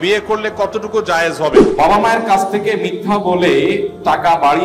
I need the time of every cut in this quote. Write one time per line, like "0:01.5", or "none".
0:01.5